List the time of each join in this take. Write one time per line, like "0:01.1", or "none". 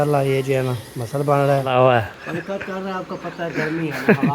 0:01.7